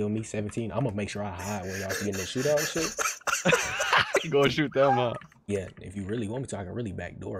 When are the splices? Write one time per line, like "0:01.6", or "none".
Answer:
none